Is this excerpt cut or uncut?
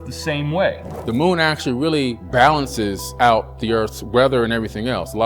cut